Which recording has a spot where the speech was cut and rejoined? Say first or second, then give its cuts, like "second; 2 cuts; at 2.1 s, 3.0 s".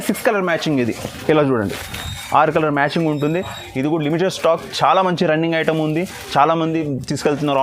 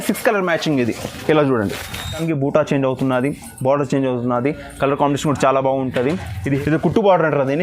second; 2 cuts; at 2.2 s, 6.6 s